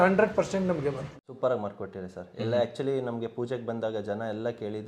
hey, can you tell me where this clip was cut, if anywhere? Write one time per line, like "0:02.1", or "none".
0:01.0